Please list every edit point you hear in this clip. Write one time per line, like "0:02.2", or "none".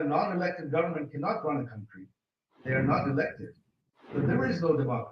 0:02.6
0:04.0